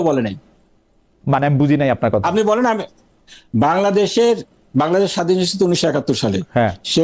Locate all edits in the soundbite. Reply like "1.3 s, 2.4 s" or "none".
none

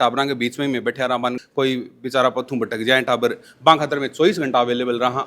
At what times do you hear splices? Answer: 1.4 s

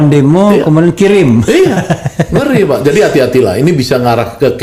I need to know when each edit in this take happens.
none

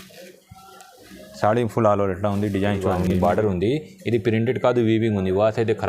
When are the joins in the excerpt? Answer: 3.1 s

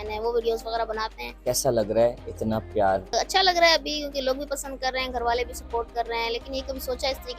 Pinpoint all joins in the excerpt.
1.3 s, 3.1 s

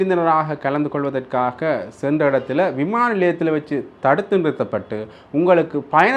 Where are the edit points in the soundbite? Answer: none

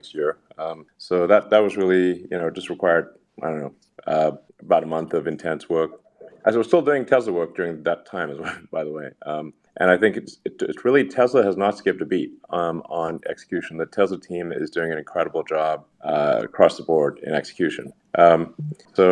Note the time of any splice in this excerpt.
none

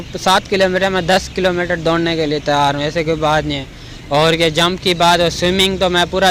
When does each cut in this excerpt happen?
none

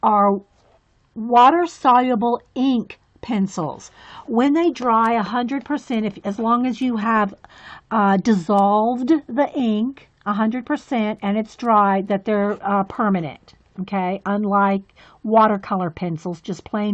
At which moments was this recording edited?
13.8 s

